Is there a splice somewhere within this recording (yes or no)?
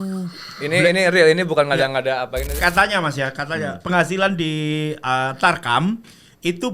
yes